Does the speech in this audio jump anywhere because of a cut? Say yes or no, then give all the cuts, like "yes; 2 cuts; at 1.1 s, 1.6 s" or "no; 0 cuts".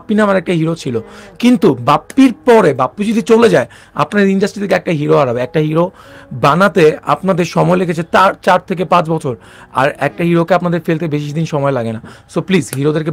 no; 0 cuts